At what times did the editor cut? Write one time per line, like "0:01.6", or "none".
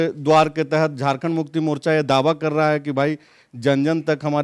none